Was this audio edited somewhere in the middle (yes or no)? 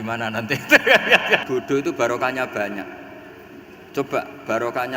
yes